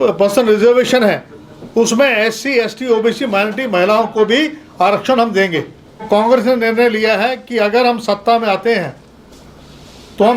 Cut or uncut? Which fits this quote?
cut